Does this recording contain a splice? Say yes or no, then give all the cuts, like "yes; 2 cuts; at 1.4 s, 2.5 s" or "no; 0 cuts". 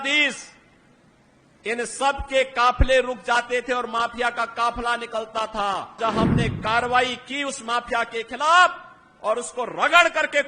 yes; 1 cut; at 6.0 s